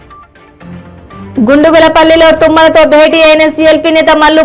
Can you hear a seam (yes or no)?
no